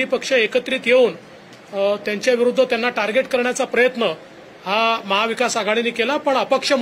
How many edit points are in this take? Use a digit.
0